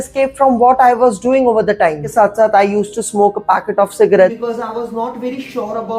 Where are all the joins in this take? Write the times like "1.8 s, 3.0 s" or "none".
2.1 s, 4.4 s